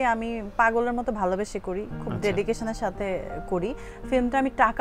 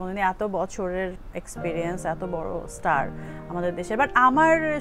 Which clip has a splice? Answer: second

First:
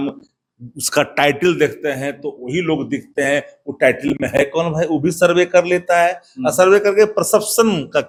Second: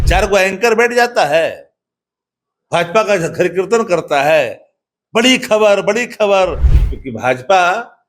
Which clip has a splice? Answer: second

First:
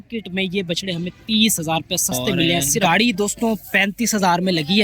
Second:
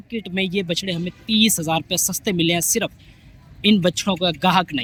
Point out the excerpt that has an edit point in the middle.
first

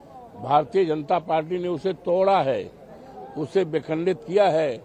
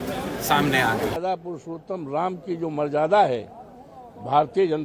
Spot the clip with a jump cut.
second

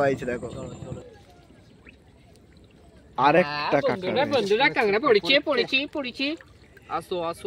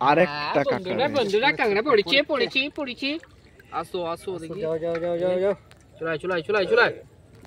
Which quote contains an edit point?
first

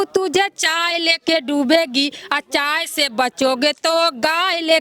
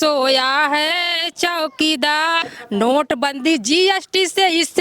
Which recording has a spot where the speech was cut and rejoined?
second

